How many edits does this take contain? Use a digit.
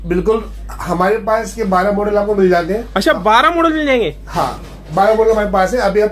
0